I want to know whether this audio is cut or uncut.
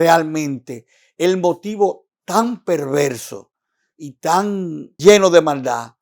cut